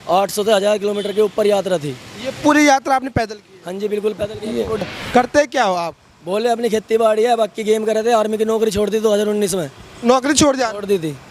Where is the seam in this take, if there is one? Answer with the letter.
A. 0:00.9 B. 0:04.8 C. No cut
B